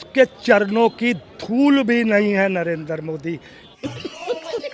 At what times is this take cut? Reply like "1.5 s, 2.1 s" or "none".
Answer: 3.6 s